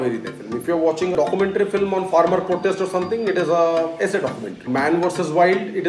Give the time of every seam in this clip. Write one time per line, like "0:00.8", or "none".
0:01.1
0:04.6